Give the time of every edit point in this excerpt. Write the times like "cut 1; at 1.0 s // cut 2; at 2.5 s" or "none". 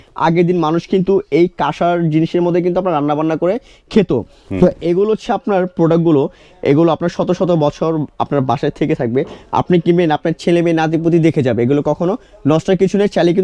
none